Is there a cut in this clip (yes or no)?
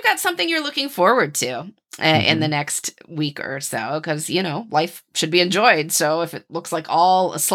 no